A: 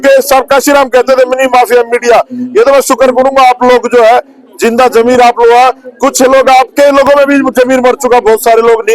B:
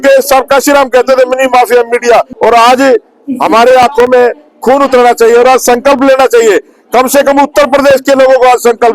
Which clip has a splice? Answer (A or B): B